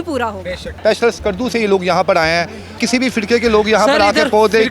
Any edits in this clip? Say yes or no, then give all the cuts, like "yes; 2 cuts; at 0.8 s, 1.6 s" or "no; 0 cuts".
yes; 2 cuts; at 0.8 s, 2.8 s